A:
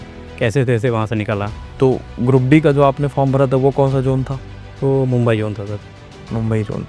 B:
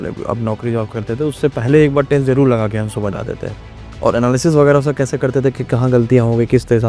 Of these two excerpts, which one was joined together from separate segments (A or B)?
A